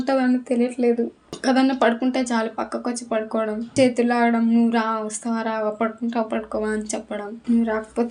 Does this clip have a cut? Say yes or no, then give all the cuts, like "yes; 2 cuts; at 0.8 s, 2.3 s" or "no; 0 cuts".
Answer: yes; 2 cuts; at 1.2 s, 3.7 s